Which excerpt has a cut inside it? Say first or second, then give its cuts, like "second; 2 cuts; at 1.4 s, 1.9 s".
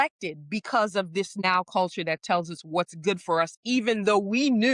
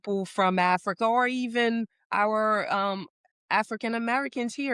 first; 1 cut; at 1.4 s